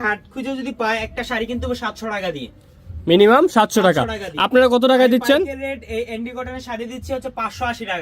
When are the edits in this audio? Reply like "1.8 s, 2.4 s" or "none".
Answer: none